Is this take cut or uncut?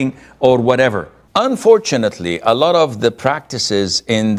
cut